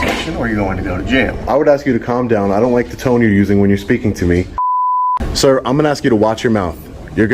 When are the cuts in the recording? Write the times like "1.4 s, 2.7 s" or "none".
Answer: 1.5 s, 4.8 s